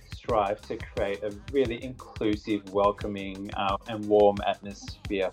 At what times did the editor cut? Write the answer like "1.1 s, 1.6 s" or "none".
none